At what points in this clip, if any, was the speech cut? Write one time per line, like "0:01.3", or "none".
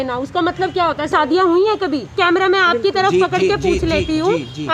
0:01.1
0:02.1

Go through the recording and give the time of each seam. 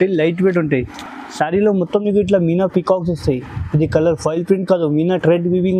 none

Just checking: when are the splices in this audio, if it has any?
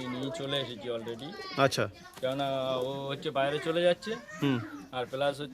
none

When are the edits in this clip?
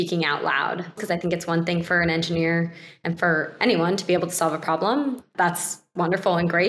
0:01.0
0:05.2

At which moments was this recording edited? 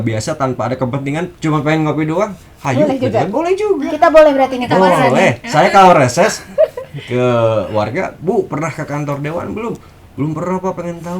none

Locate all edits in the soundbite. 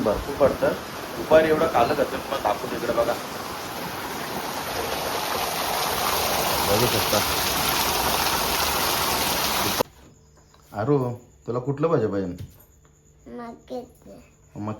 0:09.8

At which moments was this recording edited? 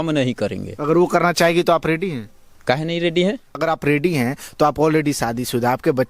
0:03.6

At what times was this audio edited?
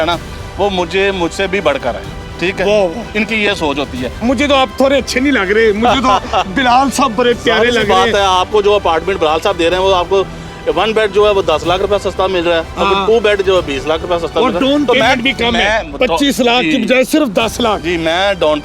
0:04.1

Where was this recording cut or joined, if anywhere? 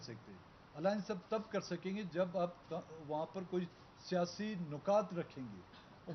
0:01.5

